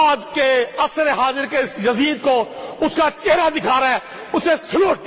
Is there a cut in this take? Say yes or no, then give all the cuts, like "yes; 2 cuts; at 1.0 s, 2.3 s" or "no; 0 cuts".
no; 0 cuts